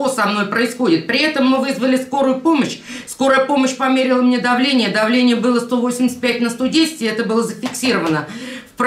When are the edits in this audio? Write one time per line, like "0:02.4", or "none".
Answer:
none